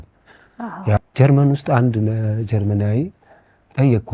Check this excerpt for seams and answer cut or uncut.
cut